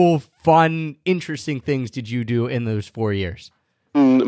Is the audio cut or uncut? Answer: cut